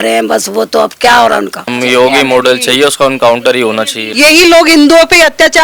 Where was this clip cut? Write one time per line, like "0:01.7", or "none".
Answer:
0:01.7
0:04.0